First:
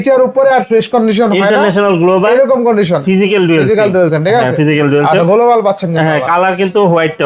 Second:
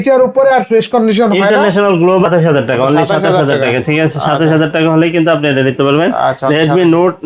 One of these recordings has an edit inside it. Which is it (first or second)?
second